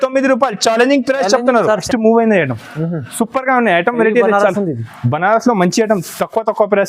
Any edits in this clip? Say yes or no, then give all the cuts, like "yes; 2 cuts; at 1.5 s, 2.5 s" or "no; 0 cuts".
yes; 1 cut; at 1.8 s